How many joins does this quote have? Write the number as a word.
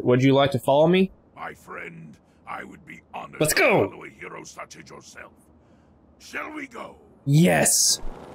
zero